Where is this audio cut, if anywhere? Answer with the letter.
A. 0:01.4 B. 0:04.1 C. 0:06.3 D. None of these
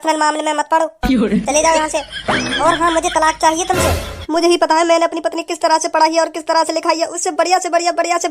B